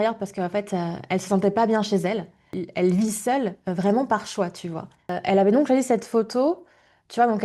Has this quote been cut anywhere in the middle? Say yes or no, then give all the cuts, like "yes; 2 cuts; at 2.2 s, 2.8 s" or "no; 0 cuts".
yes; 2 cuts; at 2.5 s, 5.1 s